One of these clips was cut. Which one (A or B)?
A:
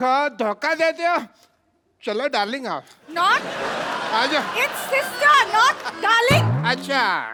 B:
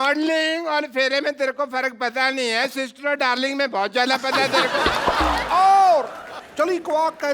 B